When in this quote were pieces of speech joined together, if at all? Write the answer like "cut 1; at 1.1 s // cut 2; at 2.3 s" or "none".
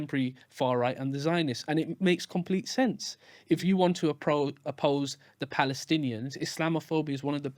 none